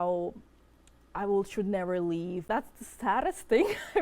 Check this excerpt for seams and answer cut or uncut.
cut